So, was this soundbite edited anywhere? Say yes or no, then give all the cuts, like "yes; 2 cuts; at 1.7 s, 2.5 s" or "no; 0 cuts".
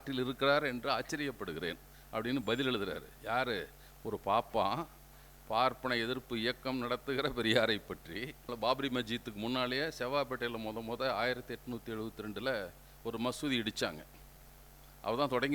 yes; 1 cut; at 8.4 s